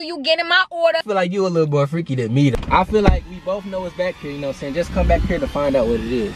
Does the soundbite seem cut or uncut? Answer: cut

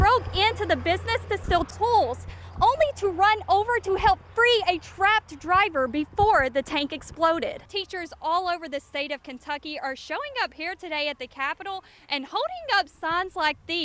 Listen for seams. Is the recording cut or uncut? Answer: cut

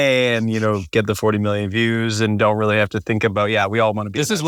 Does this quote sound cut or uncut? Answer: uncut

